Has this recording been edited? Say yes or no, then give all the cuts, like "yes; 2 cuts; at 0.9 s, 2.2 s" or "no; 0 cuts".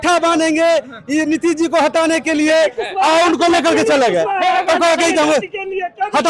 no; 0 cuts